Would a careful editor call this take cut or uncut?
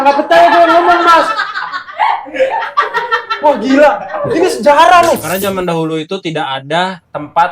cut